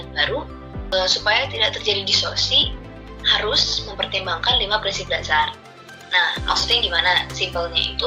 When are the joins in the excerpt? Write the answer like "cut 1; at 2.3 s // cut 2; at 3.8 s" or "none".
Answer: none